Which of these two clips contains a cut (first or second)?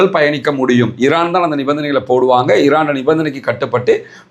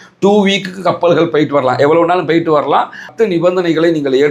second